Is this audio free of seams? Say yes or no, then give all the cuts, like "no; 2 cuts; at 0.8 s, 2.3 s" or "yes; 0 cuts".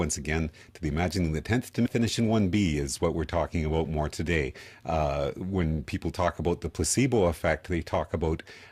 yes; 0 cuts